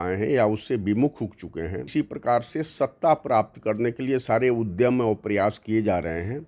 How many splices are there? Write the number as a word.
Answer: one